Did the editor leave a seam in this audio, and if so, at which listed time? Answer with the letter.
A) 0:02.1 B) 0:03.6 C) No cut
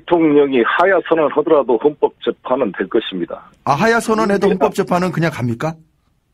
A